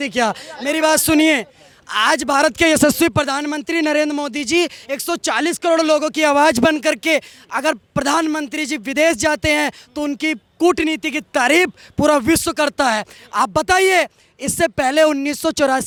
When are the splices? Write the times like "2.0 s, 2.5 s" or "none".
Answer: none